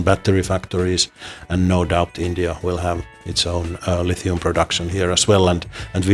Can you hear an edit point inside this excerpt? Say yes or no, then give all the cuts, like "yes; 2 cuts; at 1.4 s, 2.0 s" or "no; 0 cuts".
no; 0 cuts